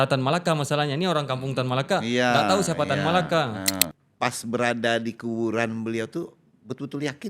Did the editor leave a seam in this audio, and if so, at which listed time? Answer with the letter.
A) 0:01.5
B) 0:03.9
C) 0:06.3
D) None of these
B